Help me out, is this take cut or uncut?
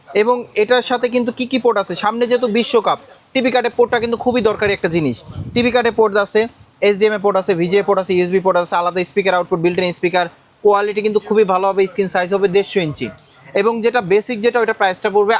uncut